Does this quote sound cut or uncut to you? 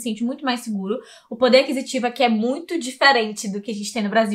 uncut